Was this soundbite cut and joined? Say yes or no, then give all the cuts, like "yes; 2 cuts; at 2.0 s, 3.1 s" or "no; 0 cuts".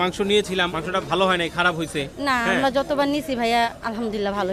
no; 0 cuts